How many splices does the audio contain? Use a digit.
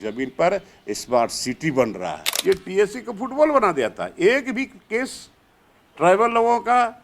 1